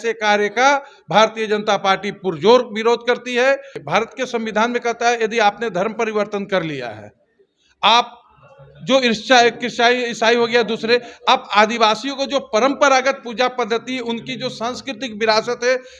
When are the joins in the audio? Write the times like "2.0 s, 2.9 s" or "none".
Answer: 3.8 s